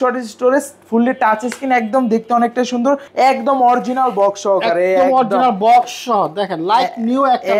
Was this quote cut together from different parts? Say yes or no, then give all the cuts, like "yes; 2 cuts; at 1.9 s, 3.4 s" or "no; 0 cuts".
yes; 1 cut; at 3.1 s